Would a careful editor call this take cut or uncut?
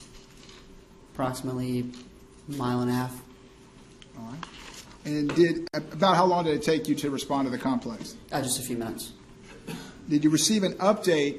uncut